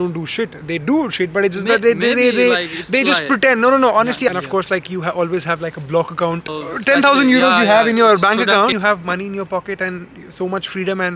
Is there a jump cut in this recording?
yes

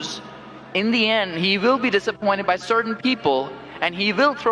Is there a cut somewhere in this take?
no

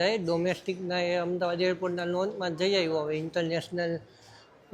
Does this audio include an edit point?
no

